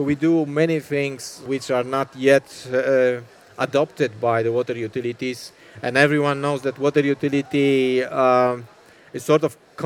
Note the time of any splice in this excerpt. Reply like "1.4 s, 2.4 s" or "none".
1.5 s

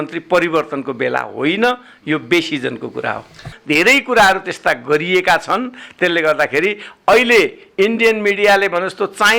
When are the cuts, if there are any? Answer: 3.5 s

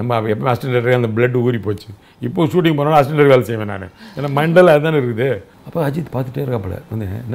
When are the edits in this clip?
5.6 s

